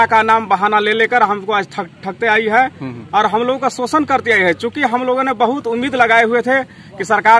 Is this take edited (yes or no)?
no